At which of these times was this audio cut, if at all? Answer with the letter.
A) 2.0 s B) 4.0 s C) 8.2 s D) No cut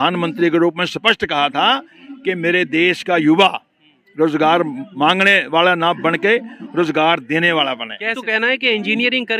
C